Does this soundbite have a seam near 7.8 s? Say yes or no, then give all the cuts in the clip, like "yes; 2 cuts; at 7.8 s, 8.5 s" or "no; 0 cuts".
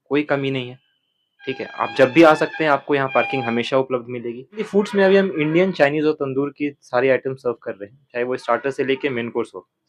no; 1 cut; at 4.6 s